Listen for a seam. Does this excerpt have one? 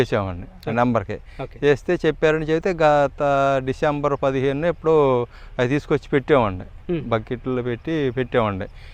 no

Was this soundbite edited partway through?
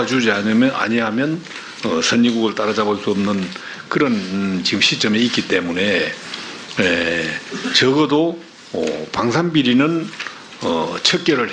no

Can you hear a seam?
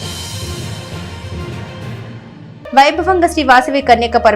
yes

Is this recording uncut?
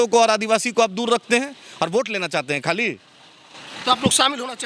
yes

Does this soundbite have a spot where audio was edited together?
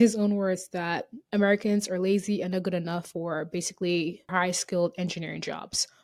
no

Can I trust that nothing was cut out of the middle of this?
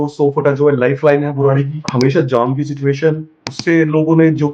no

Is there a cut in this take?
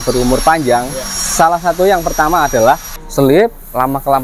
yes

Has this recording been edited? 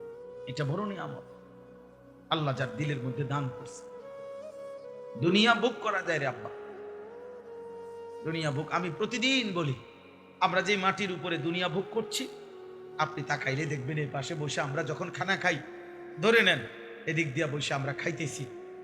yes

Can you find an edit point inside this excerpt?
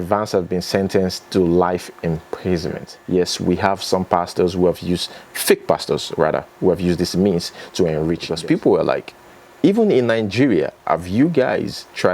yes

